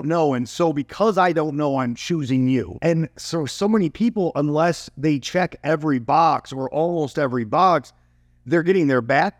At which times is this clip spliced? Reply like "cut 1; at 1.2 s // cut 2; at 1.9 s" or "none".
cut 1; at 2.7 s